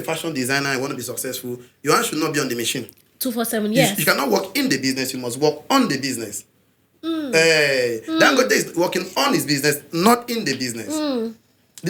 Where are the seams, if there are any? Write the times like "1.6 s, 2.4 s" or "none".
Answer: none